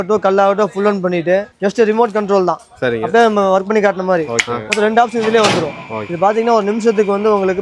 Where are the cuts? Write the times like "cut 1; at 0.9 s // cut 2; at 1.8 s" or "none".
none